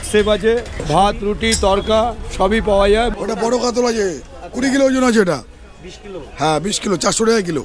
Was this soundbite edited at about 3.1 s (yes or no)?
yes